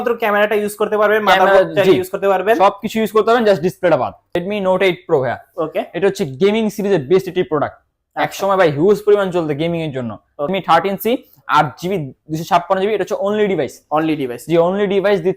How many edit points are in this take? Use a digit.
2